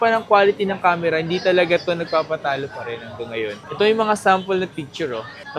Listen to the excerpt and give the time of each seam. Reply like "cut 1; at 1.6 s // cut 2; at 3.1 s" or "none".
none